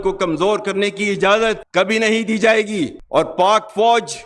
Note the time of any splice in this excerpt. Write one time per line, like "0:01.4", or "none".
none